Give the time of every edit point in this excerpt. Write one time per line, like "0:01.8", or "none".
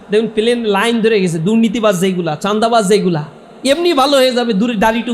none